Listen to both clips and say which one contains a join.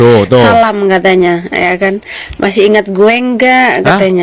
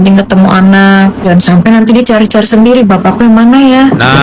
second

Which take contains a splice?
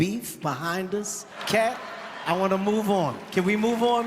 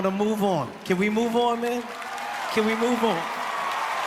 first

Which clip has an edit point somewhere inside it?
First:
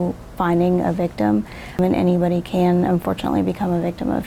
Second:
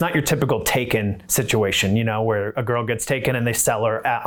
first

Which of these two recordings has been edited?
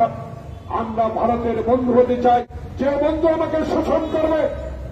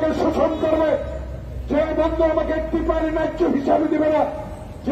first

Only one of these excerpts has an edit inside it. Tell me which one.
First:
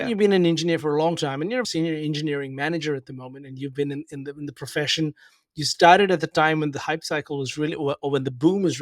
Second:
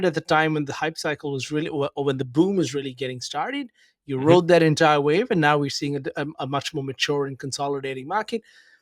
first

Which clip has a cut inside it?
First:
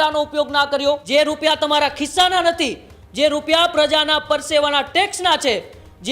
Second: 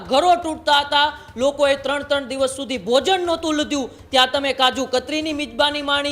first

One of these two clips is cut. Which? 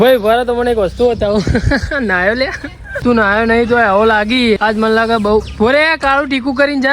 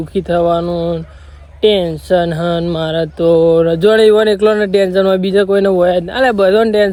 first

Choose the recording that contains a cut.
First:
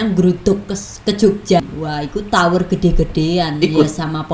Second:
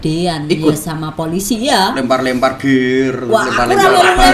first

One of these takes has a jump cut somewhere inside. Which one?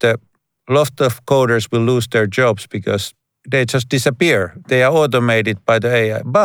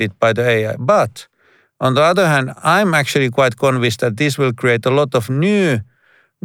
first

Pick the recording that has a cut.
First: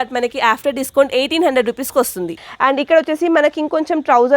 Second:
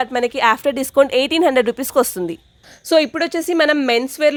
first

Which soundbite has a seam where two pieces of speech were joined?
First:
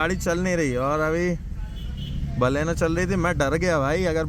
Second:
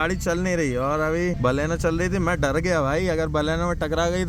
second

